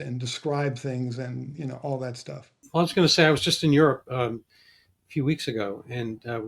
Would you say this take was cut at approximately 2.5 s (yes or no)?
yes